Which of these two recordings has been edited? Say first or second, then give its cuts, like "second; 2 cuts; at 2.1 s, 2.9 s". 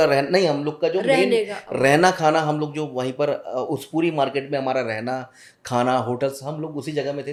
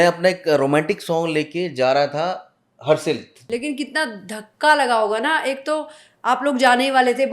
second; 1 cut; at 3.4 s